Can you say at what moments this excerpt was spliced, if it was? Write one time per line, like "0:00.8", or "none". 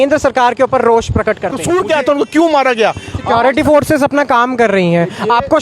0:01.6